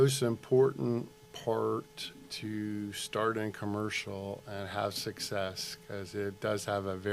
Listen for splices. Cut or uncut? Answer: uncut